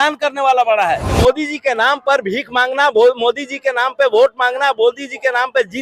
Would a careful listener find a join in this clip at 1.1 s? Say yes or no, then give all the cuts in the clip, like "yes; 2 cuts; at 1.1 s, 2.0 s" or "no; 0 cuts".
yes; 1 cut; at 1.1 s